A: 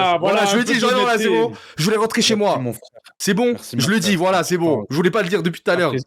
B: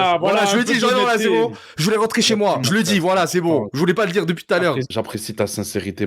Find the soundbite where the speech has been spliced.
B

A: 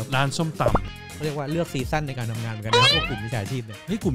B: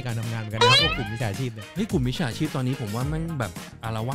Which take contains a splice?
A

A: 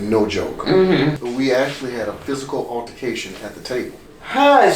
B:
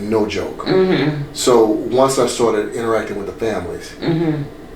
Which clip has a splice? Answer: A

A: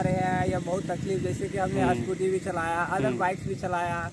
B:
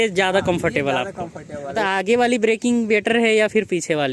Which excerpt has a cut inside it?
B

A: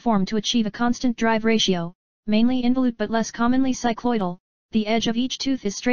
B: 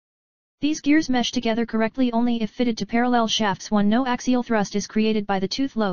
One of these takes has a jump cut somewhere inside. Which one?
B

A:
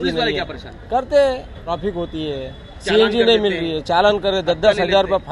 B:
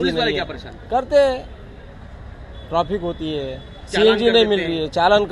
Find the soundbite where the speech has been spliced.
A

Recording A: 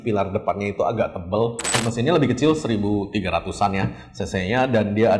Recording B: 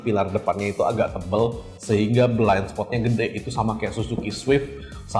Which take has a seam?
A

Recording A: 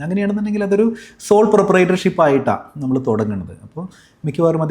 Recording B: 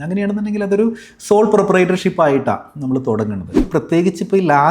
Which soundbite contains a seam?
B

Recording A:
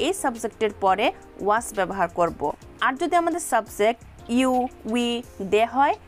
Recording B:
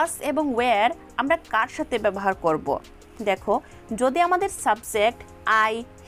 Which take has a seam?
A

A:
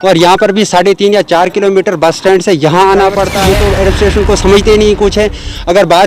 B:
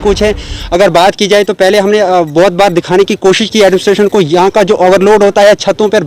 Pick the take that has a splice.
A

